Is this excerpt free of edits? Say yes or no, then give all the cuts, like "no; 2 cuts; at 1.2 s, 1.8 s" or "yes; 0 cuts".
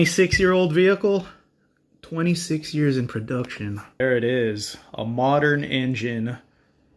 no; 1 cut; at 3.9 s